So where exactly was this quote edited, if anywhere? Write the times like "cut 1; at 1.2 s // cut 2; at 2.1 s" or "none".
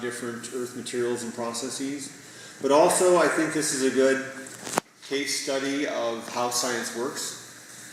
none